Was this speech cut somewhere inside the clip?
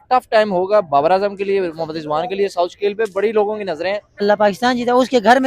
yes; 1 cut; at 4.2 s

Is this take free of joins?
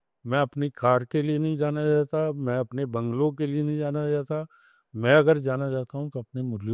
yes; 0 cuts

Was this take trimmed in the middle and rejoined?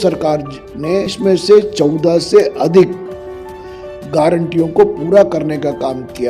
yes; 1 cut; at 1.1 s

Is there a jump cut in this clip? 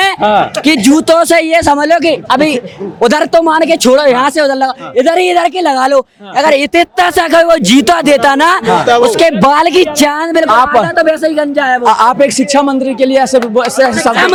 no; 0 cuts

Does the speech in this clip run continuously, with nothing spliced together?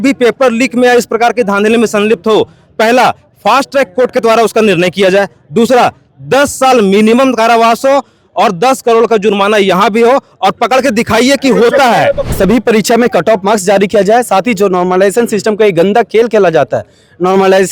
no; 1 cut; at 12.3 s

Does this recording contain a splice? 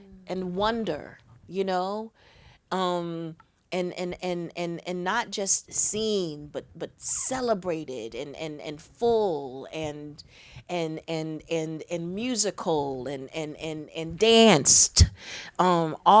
no; 0 cuts

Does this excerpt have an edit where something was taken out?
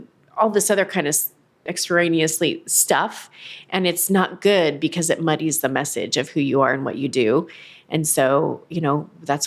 yes; 1 cut; at 1.8 s

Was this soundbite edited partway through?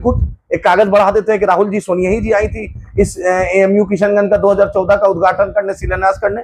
no; 0 cuts

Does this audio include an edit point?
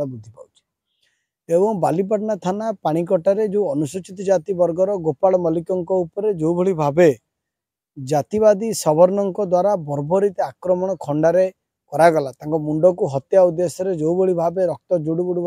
no; 0 cuts

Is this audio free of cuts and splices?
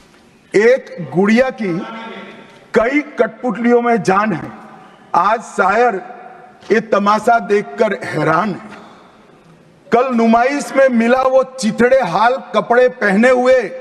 yes; 0 cuts

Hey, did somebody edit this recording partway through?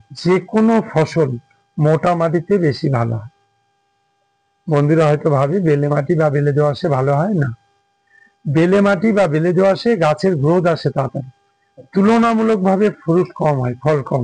no; 0 cuts

